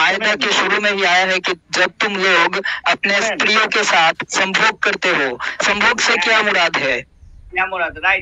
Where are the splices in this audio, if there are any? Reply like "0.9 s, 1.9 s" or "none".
none